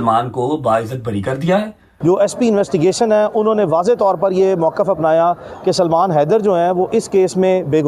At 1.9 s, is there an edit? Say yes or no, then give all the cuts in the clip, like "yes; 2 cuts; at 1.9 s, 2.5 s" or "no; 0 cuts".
yes; 1 cut; at 1.9 s